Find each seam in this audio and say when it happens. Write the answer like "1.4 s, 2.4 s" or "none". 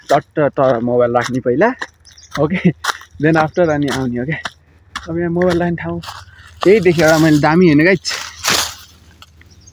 none